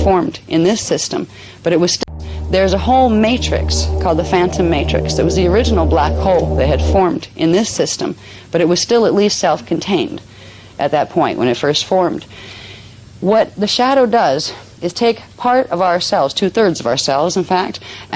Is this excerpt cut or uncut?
cut